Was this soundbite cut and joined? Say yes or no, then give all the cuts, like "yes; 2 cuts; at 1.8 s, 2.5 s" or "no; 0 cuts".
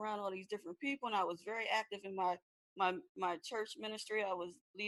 no; 0 cuts